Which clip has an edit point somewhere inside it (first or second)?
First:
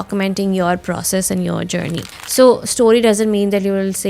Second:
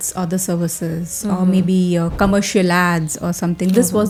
first